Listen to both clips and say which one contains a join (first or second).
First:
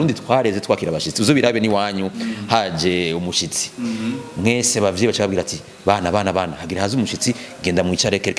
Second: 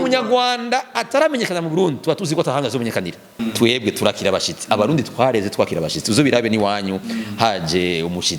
second